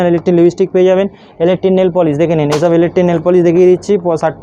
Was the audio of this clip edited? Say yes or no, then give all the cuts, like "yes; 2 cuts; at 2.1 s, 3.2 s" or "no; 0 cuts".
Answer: no; 0 cuts